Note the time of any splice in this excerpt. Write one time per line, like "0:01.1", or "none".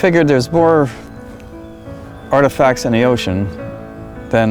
none